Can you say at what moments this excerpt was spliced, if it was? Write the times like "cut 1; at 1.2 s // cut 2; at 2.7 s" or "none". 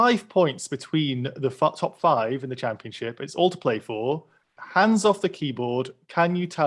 cut 1; at 4.6 s

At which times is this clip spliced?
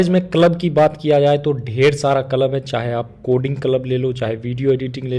none

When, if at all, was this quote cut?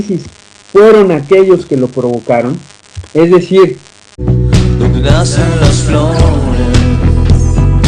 none

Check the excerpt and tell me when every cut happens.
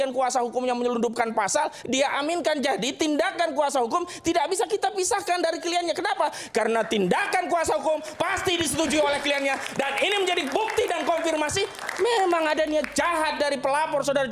none

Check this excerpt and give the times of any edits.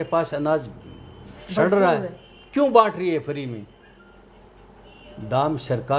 none

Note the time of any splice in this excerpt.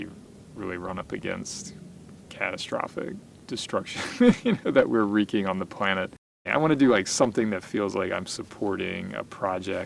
cut 1; at 3.3 s // cut 2; at 6.5 s

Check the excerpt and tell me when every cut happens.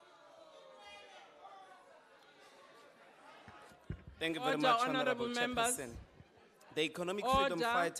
none

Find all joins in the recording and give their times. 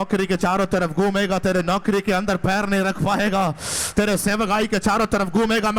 none

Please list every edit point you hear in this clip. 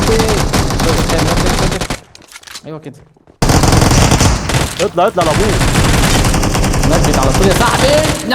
cut 1; at 3.4 s

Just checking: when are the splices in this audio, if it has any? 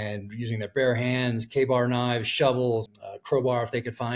cut 1; at 2.8 s

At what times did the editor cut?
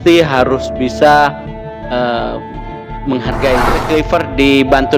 cut 1; at 3.8 s

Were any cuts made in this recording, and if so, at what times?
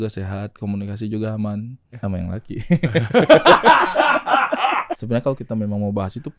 cut 1; at 2.0 s // cut 2; at 4.9 s

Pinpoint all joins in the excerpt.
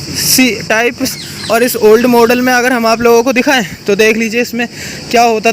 cut 1; at 1.1 s

